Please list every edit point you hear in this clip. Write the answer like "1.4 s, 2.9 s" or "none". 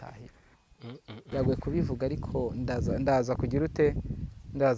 1.3 s

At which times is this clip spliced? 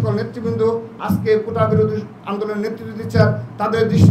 none

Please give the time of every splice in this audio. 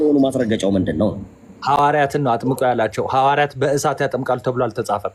none

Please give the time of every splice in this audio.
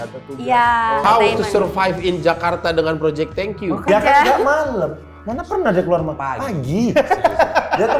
1.0 s, 3.9 s

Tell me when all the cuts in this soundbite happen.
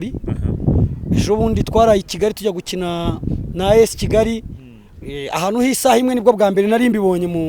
none

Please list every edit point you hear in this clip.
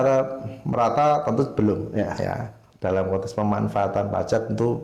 none

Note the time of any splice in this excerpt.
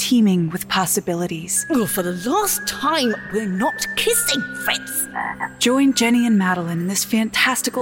1.6 s, 5.5 s

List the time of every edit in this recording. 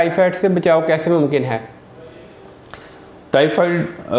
none

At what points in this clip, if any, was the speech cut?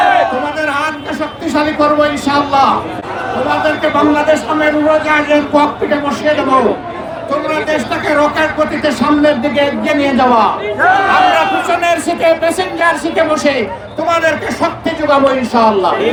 none

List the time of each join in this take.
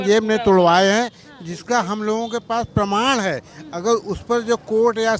none

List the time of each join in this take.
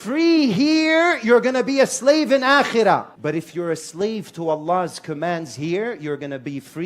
3.1 s

